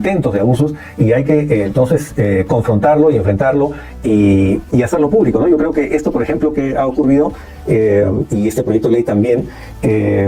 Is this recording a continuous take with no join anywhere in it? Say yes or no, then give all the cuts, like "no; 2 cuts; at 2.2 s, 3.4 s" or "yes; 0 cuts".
yes; 0 cuts